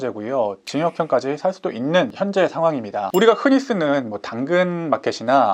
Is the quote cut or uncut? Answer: cut